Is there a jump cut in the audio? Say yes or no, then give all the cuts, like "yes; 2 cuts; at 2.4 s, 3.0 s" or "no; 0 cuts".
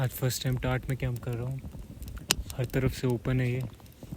no; 0 cuts